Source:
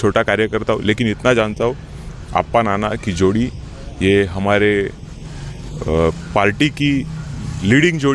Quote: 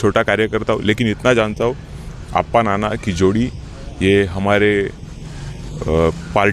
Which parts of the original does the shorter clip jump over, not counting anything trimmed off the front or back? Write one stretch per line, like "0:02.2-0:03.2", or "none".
none